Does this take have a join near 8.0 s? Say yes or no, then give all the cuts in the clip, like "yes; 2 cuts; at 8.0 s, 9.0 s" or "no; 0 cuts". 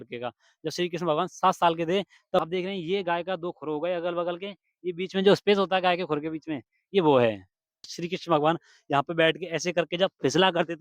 yes; 2 cuts; at 2.4 s, 8.0 s